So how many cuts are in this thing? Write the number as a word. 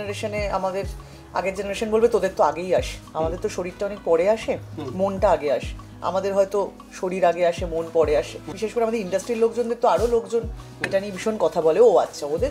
one